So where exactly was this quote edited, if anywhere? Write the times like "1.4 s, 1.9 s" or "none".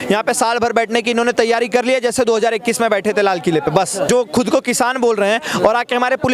4.1 s